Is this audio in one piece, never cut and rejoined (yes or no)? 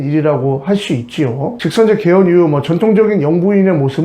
no